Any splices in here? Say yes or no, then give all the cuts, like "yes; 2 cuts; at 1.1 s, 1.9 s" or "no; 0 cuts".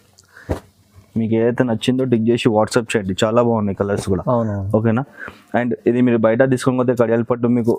no; 0 cuts